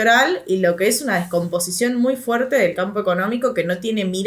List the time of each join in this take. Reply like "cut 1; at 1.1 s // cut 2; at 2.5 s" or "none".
none